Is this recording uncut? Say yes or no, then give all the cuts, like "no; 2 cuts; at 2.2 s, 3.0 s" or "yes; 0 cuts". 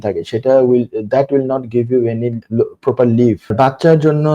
no; 2 cuts; at 2.4 s, 3.5 s